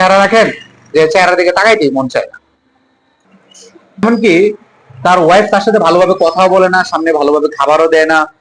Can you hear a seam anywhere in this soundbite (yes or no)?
yes